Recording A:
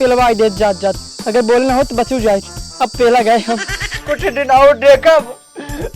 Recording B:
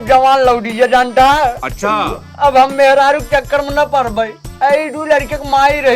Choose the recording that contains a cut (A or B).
A